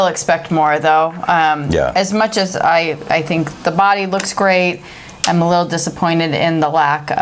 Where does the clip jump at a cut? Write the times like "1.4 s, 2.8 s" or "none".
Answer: none